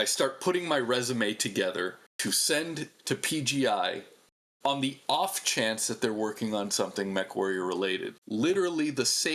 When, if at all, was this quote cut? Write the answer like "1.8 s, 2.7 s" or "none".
2.1 s, 8.2 s